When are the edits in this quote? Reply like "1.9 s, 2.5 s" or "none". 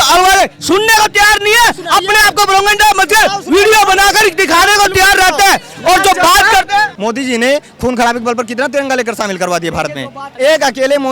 6.9 s, 10.2 s